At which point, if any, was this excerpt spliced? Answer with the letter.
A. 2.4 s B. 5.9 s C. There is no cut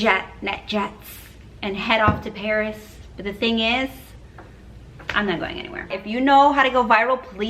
B